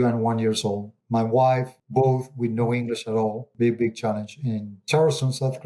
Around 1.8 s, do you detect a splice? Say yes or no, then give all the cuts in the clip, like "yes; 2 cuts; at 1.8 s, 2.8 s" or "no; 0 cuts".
yes; 3 cuts; at 0.9 s, 1.8 s, 3.4 s